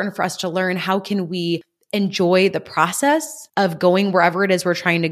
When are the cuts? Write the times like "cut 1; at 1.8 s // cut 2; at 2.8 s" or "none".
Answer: cut 1; at 3.4 s